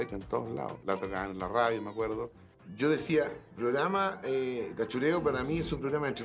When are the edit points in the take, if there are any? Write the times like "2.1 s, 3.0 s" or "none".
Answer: 2.3 s